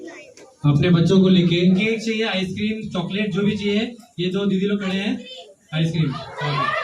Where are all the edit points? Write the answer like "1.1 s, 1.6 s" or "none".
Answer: 1.8 s